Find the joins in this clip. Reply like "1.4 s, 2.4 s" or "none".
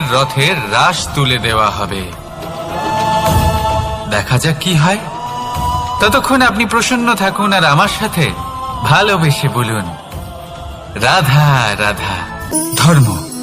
12.5 s

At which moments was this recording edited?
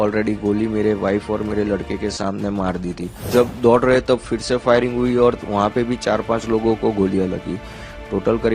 3.2 s

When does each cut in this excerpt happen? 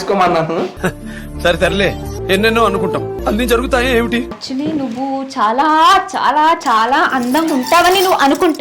4.4 s

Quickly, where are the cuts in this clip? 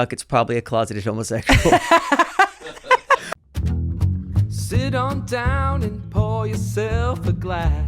3.3 s

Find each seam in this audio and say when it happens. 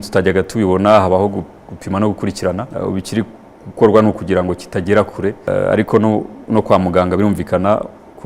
2.7 s, 5.5 s

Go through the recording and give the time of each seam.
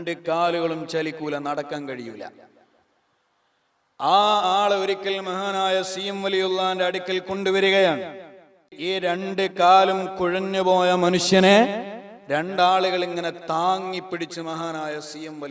8.7 s

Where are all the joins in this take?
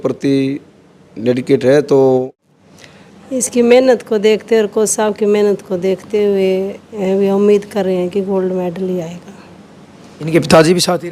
2.4 s

